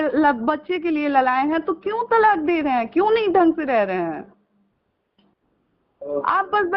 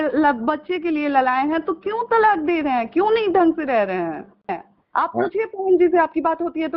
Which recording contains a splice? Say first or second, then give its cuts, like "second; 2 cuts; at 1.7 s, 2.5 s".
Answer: second; 1 cut; at 4.5 s